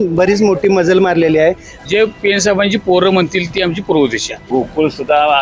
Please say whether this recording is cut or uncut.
cut